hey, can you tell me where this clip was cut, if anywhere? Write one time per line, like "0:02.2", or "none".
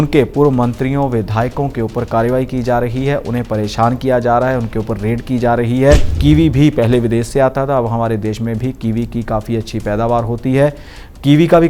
0:06.1